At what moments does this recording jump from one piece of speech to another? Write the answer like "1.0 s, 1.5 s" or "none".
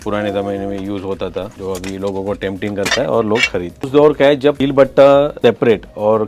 1.5 s, 3.9 s, 4.6 s, 5.3 s